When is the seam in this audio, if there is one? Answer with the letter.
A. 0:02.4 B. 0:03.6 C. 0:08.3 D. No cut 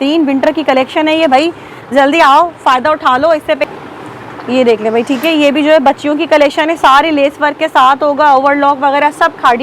B